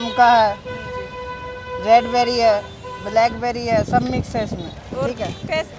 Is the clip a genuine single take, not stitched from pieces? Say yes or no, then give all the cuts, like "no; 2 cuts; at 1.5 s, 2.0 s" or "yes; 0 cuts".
yes; 0 cuts